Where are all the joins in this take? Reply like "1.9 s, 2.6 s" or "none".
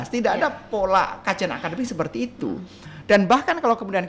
none